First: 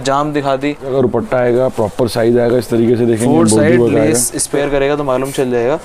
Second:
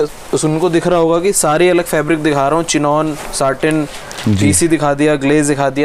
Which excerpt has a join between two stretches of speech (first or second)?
first